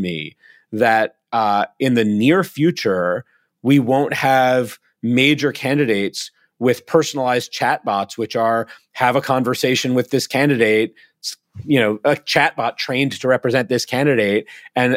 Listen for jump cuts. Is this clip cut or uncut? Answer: uncut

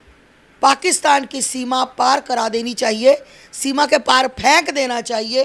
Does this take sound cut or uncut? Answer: uncut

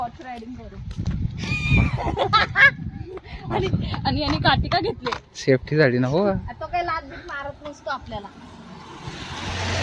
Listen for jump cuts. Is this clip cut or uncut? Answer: uncut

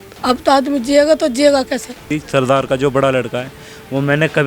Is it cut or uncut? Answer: cut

